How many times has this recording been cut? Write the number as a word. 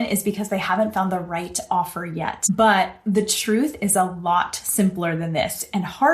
one